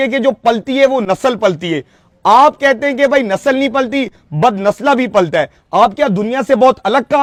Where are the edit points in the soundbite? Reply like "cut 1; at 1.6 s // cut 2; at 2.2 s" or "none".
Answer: none